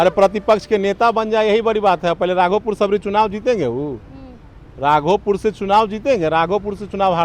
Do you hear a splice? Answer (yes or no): no